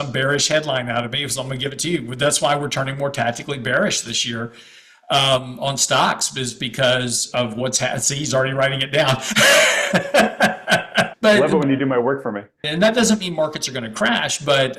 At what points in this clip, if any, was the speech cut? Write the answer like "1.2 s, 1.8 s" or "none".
11.1 s, 12.6 s